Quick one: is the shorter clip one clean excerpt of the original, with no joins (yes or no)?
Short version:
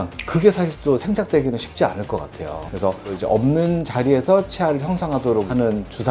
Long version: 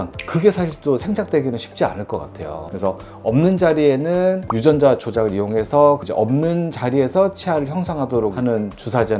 no